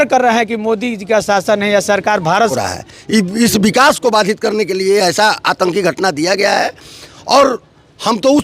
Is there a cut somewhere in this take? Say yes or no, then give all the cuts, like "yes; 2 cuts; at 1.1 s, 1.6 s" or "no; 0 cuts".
yes; 1 cut; at 2.5 s